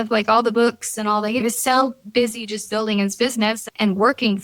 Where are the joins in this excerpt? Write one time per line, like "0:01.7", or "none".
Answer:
0:01.4